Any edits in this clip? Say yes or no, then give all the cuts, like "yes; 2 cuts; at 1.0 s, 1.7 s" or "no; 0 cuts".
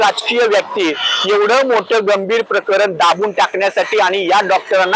no; 0 cuts